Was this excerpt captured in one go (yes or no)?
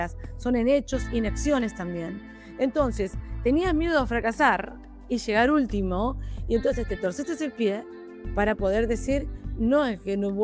yes